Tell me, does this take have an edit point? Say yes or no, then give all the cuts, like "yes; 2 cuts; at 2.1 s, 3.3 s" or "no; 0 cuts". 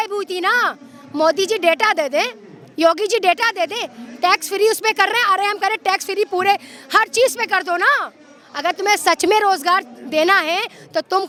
no; 0 cuts